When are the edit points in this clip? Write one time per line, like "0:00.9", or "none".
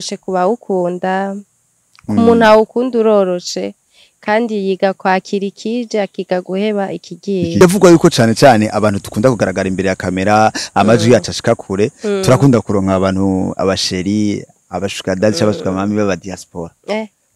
0:07.6